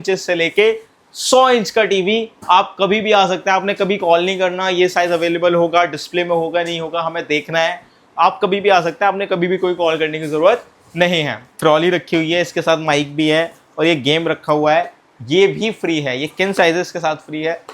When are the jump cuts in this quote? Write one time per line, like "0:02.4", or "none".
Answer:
0:11.6